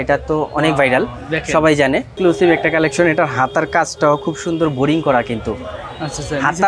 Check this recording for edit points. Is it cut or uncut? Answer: uncut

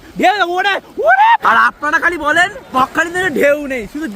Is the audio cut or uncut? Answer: cut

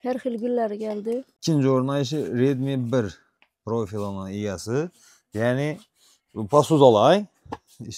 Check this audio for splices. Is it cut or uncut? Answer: cut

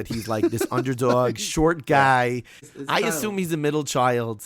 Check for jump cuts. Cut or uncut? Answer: cut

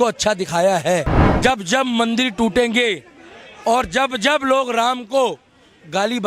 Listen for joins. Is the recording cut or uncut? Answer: cut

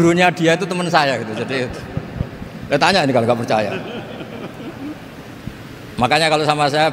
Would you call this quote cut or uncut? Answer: uncut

